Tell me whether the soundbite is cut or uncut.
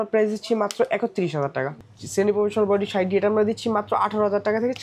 cut